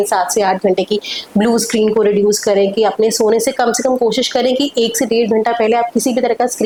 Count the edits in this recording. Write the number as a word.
zero